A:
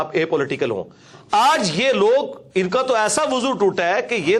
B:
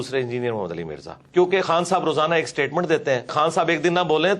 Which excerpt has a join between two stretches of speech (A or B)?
B